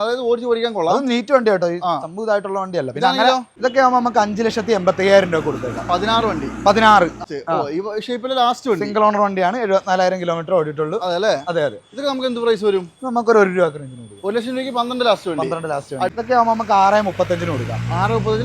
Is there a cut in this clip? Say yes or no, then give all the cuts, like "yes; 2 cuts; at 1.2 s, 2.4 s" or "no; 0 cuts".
yes; 3 cuts; at 3.5 s, 7.2 s, 16.1 s